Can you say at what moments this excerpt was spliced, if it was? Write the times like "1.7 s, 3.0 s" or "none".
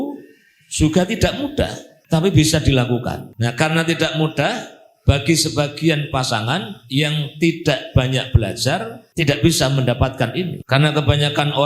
1.9 s, 3.3 s, 9.0 s, 10.6 s